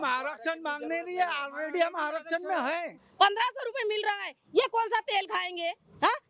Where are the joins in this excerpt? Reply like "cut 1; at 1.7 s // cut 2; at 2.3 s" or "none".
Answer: cut 1; at 3.0 s

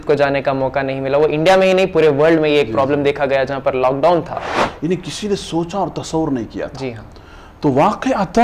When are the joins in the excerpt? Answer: cut 1; at 4.6 s

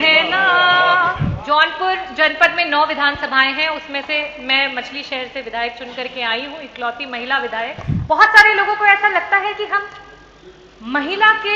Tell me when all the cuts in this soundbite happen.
cut 1; at 1.3 s // cut 2; at 7.9 s

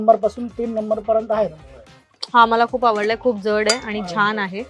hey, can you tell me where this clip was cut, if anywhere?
none

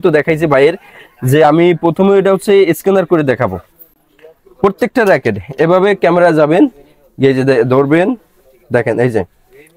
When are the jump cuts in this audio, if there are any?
none

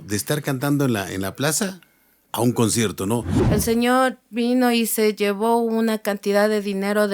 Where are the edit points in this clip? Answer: cut 1; at 3.4 s

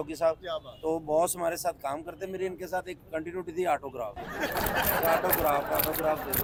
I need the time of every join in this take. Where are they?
none

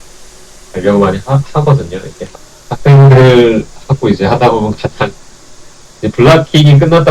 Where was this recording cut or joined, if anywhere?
cut 1; at 2.2 s

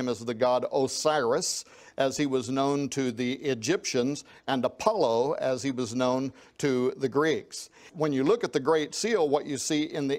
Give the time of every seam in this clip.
cut 1; at 7.9 s

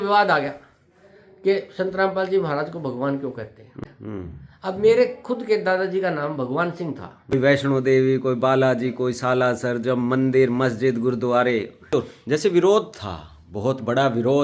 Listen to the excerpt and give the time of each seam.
cut 1; at 3.8 s // cut 2; at 7.3 s // cut 3; at 11.9 s

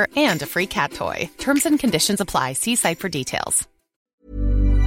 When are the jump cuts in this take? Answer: cut 1; at 3.9 s

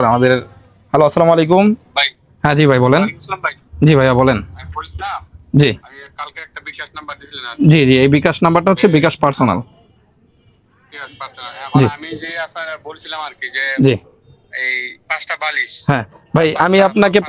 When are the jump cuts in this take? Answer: none

